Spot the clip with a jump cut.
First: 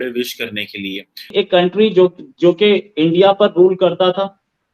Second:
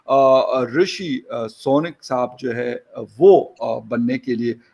first; 1 cut; at 1.3 s

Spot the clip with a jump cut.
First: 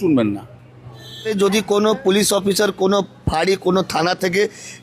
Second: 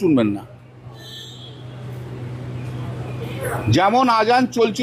first; 1 cut; at 1.3 s

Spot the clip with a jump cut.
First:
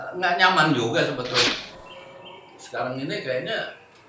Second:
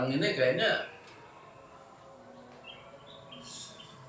first; 1 cut; at 1.5 s

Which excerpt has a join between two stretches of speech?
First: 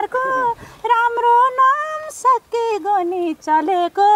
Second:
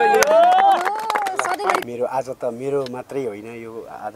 second; 1 cut; at 1.8 s

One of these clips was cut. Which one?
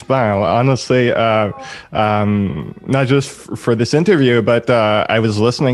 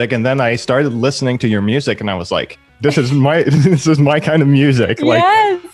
second; 1 cut; at 2.6 s

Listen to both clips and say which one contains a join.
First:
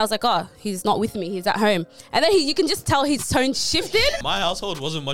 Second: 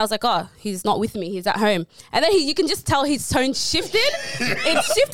first; 1 cut; at 4.2 s

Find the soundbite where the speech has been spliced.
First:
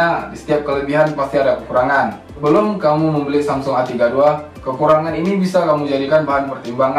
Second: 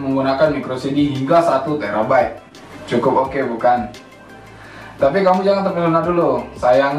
second; 1 cut; at 2.5 s

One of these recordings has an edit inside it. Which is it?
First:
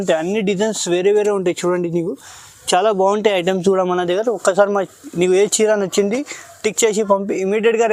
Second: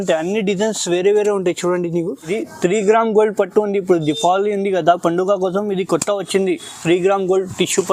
second; 1 cut; at 2.4 s

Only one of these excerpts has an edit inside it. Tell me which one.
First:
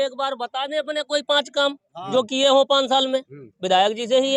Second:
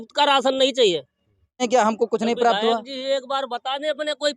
second; 1 cut; at 1.6 s

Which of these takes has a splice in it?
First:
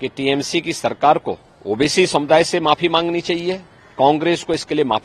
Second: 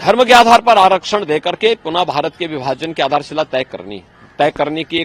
first; 1 cut; at 1.5 s

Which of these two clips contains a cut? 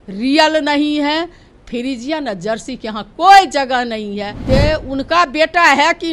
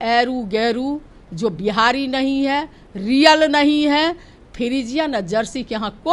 first; 1 cut; at 4.3 s

